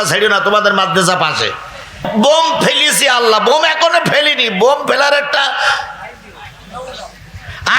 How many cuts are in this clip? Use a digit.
1